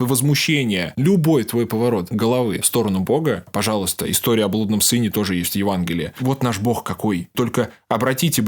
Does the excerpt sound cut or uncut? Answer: cut